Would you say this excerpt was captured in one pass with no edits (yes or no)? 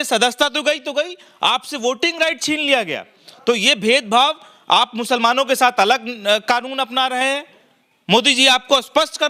yes